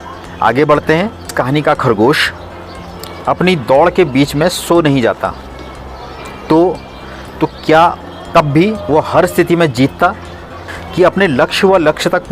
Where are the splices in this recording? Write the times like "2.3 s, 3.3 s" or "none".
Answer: 1.3 s, 10.6 s